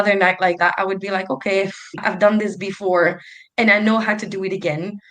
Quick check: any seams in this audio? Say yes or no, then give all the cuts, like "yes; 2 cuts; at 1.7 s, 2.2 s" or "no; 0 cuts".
yes; 1 cut; at 2.0 s